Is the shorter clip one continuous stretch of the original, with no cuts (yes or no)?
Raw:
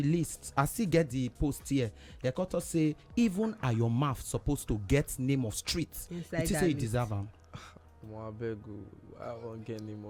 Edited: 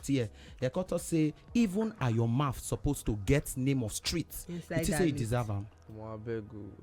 no